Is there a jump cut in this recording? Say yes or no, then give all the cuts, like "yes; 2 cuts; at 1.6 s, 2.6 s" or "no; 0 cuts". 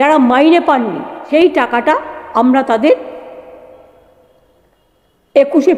yes; 1 cut; at 1.1 s